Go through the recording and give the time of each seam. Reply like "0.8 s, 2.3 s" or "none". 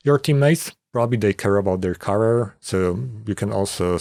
none